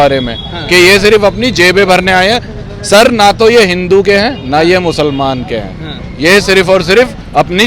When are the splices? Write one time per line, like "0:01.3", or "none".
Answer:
none